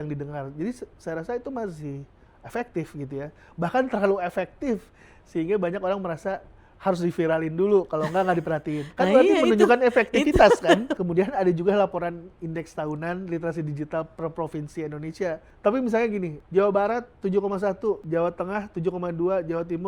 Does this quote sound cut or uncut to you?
cut